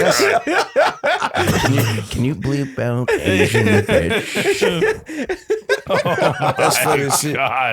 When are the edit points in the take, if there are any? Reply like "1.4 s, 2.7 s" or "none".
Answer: none